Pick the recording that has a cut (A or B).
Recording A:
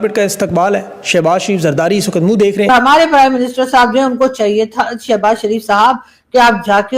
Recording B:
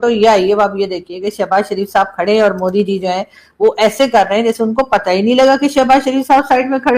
A